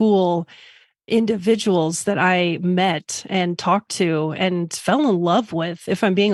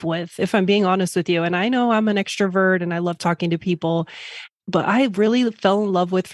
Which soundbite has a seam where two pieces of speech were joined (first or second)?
second